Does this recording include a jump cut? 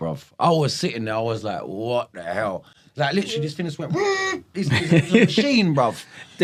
no; 0 cuts

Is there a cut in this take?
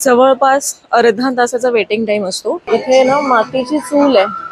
yes; 1 cut; at 2.7 s

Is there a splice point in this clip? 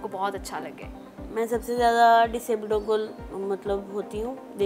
no; 0 cuts

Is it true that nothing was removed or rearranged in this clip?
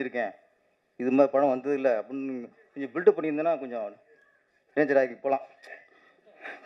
yes; 0 cuts

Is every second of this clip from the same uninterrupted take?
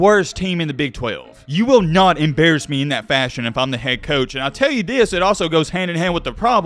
no; 1 cut; at 1.3 s

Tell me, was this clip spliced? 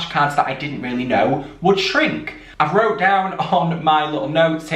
yes; 1 cut; at 2.4 s

